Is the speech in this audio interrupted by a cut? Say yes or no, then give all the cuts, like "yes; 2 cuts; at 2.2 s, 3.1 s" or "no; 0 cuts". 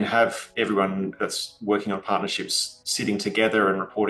no; 0 cuts